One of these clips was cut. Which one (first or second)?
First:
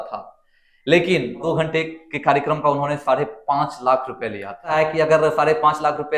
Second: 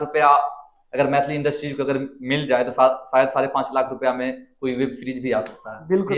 first